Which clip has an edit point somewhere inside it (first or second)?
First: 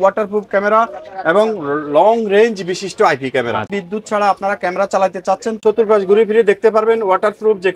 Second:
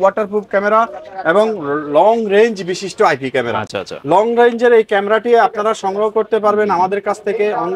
first